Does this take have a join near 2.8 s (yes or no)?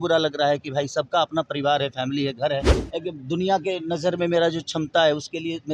yes